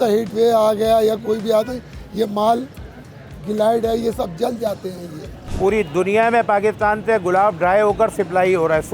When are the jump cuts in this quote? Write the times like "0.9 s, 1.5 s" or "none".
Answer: 5.5 s